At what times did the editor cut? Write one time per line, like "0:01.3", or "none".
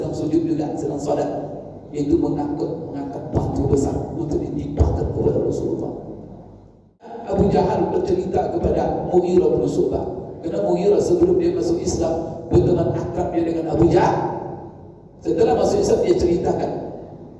0:07.2